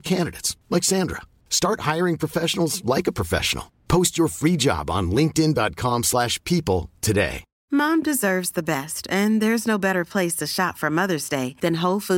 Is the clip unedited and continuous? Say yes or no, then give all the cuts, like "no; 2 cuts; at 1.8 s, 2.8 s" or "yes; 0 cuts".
no; 1 cut; at 7.5 s